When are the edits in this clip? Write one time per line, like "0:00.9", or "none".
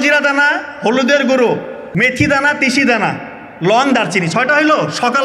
0:01.8